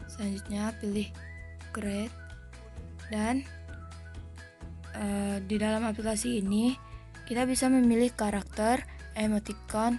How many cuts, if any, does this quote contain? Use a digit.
2